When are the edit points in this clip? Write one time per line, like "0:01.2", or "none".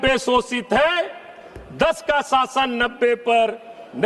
none